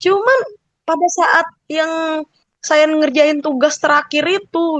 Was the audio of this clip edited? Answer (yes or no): no